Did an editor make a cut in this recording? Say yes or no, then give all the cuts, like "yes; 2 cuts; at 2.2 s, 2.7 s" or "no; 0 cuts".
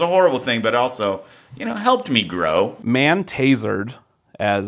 yes; 1 cut; at 2.8 s